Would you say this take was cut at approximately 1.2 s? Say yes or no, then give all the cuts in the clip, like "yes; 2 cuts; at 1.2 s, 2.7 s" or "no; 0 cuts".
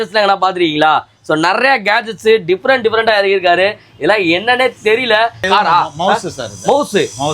no; 1 cut; at 5.4 s